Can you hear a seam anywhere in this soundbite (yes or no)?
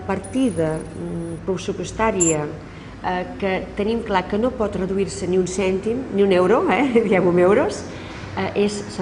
yes